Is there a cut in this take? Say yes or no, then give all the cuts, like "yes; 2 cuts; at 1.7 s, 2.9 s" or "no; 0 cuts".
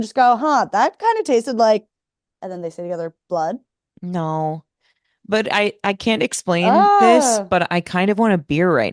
no; 0 cuts